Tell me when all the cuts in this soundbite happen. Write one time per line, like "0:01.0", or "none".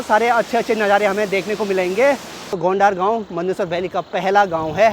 0:02.3